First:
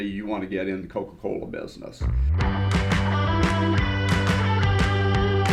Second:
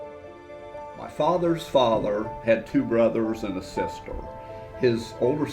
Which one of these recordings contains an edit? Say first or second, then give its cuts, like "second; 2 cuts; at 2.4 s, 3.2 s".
second; 1 cut; at 0.9 s